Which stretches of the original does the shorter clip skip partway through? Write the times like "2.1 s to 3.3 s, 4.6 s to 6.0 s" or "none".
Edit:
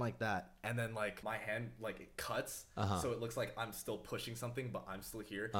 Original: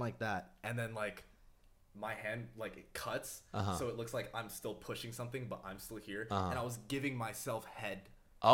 1.2 s to 1.9 s

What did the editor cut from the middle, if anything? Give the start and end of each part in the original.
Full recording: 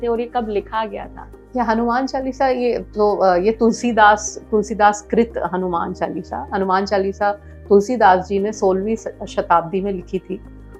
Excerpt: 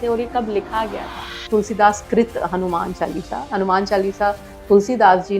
1.3 s to 4.3 s

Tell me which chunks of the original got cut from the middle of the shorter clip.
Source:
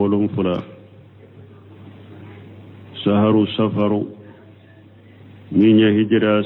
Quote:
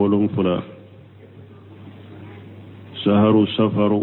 none

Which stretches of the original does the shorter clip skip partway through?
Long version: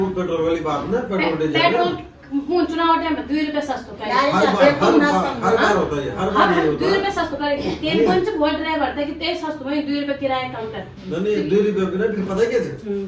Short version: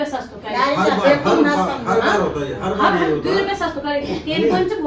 none

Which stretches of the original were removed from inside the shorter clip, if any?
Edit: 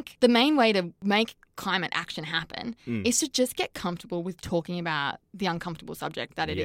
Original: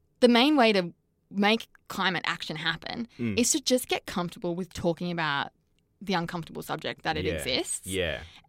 0.9 s to 1.3 s, 5.6 s to 5.9 s

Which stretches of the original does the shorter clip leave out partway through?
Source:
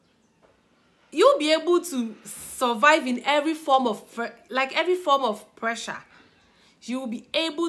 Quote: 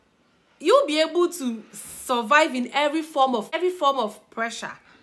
4.0 s to 4.8 s

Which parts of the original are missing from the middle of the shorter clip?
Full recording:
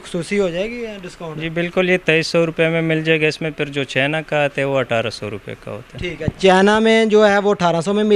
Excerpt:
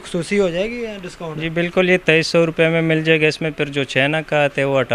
none

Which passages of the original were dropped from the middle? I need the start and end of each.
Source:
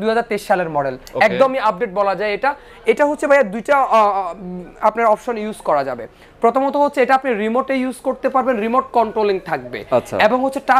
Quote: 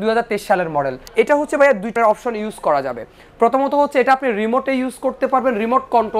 1.0 s to 2.7 s, 3.6 s to 5.0 s

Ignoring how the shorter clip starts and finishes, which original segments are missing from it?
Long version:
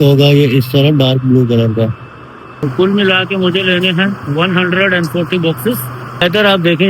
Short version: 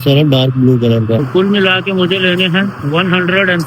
1.9 s to 2.7 s

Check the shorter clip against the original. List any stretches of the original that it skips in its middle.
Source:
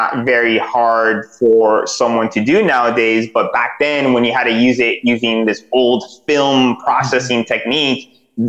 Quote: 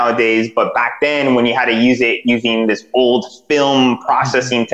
none

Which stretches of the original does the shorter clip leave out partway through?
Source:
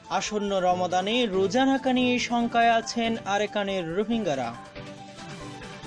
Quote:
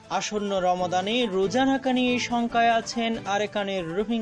none

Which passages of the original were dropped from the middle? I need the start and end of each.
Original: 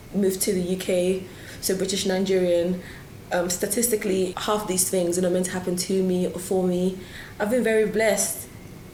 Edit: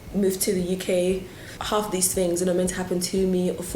1.6 s to 4.4 s

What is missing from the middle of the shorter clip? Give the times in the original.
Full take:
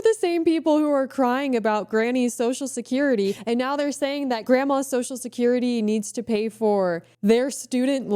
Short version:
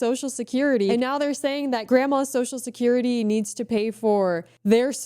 3.3 s to 3.5 s

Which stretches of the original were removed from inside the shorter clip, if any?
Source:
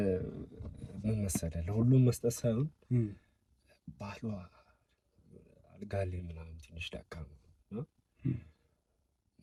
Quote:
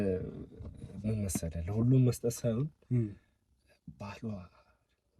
none

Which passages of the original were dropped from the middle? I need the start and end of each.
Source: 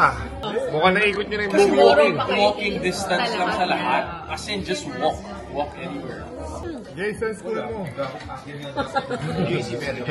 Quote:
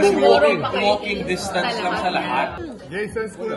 4.2 s to 6.7 s

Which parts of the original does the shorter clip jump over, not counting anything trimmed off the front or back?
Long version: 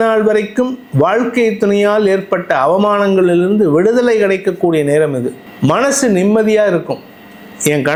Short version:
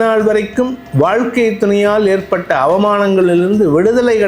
none

